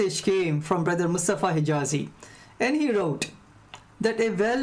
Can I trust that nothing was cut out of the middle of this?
no; 2 cuts; at 0.8 s, 2.1 s

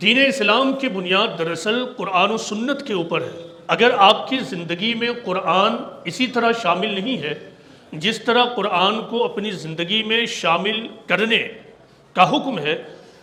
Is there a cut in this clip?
no; 0 cuts

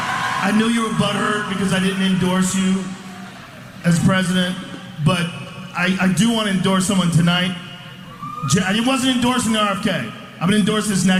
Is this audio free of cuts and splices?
yes; 0 cuts

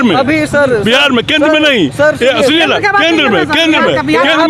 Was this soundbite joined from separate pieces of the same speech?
no; 0 cuts

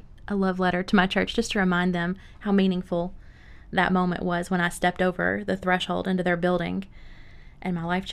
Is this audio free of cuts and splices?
yes; 0 cuts

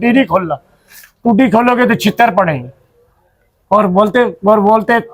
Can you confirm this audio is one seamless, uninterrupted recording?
yes; 0 cuts

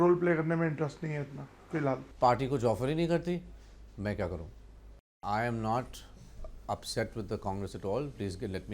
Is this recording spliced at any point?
yes; 1 cut; at 5.1 s

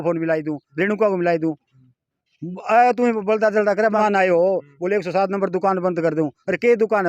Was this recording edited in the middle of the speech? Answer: yes; 1 cut; at 4.0 s

